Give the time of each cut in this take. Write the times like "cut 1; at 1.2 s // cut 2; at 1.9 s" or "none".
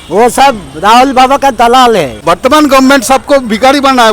cut 1; at 2.1 s